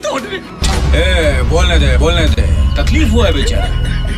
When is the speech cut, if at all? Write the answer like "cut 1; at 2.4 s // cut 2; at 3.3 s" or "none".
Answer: none